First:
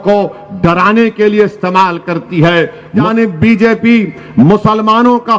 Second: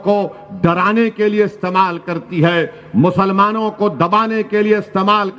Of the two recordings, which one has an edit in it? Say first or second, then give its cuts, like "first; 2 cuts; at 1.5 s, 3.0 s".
first; 1 cut; at 3.1 s